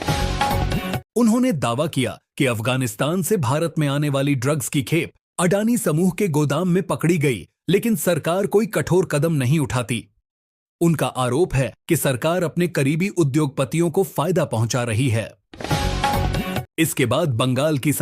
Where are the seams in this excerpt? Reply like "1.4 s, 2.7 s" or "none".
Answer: 15.5 s, 16.7 s